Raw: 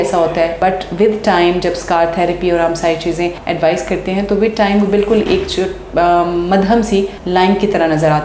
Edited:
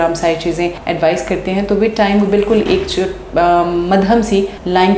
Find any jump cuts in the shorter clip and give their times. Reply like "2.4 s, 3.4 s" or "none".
none